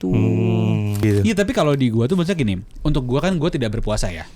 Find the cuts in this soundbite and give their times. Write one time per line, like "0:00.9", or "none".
0:01.0